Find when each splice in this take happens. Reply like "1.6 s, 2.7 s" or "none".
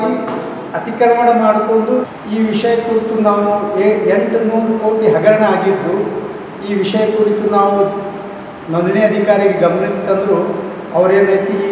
2.1 s